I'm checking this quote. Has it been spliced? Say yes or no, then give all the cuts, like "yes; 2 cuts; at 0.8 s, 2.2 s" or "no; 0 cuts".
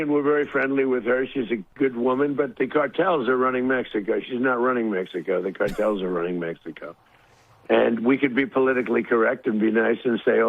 yes; 1 cut; at 7.4 s